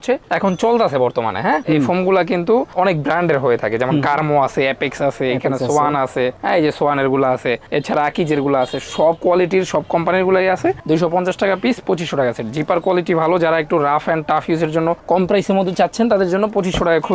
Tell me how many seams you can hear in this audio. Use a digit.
2